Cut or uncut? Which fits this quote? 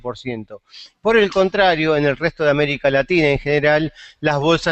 cut